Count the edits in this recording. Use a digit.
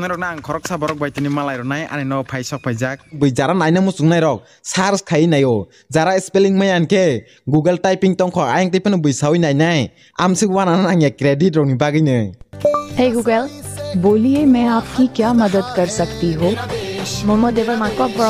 1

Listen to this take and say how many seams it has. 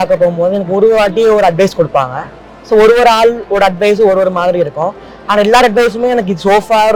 0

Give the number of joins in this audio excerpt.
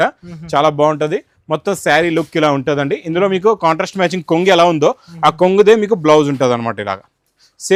0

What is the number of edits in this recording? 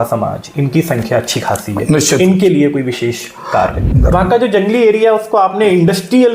1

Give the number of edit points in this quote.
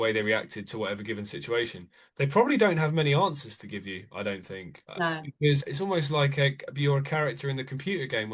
1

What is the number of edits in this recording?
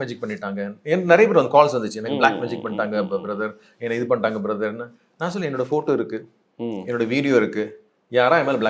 0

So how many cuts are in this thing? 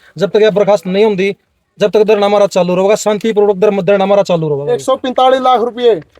1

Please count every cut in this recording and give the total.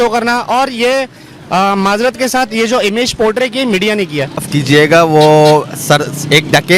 1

